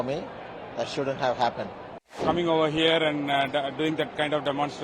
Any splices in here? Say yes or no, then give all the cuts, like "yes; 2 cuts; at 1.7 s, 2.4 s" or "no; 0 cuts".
yes; 1 cut; at 2.0 s